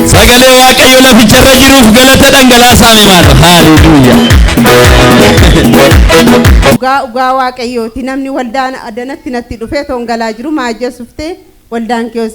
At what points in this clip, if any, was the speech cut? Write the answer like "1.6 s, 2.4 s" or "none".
6.8 s